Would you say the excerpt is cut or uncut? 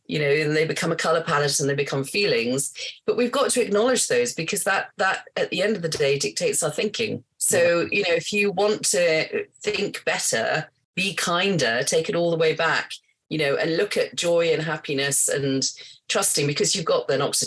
cut